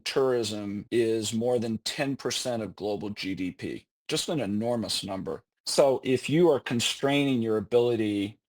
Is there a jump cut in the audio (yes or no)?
yes